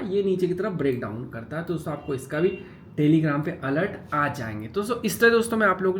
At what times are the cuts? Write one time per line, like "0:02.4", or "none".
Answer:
none